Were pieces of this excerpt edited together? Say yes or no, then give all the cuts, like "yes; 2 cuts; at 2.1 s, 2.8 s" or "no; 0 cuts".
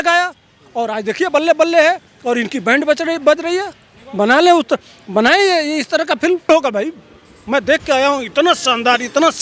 yes; 1 cut; at 6.5 s